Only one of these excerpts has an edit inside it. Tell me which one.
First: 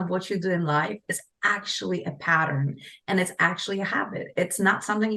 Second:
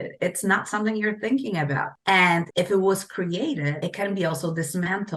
second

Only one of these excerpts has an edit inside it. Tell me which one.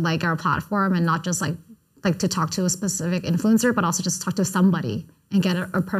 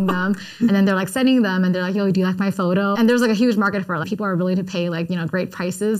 second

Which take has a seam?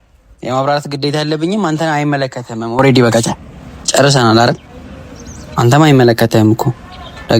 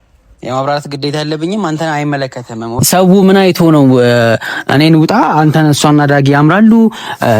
second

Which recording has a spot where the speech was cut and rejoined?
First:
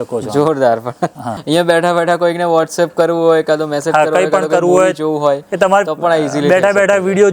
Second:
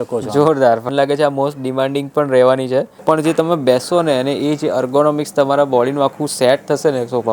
second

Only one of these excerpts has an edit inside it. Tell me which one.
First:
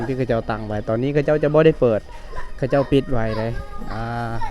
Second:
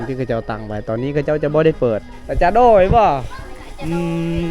second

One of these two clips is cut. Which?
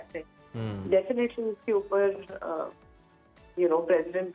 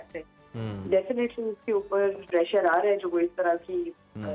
second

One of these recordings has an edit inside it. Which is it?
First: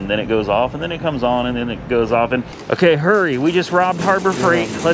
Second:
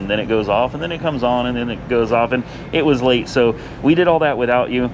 first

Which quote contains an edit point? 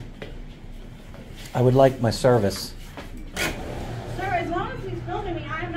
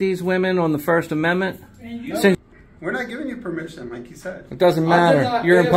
second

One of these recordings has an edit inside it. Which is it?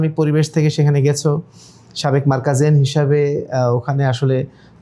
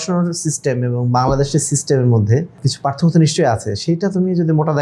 second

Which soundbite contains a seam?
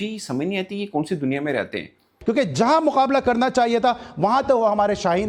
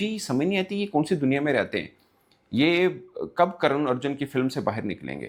first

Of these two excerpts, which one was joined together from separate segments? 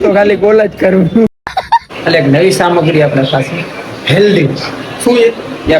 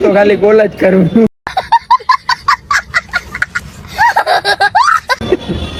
first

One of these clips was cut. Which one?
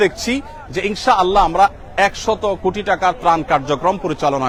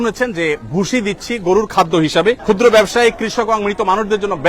second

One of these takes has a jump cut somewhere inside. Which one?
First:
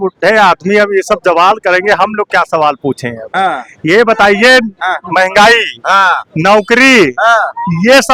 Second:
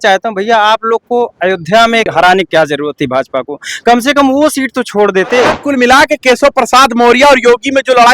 second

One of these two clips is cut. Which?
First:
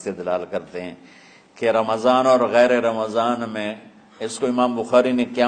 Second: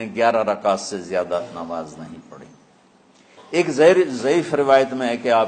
second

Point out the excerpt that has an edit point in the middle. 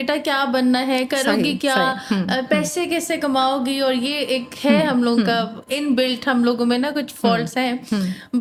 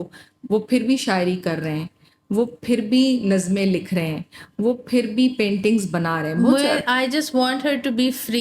second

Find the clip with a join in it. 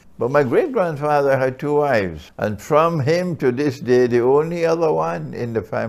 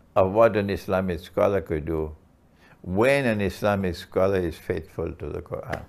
first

